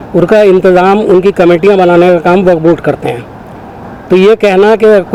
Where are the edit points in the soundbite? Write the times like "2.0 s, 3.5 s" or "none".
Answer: none